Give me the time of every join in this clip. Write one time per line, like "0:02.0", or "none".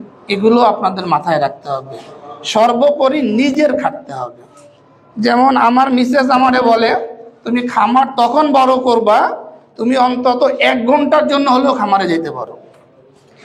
none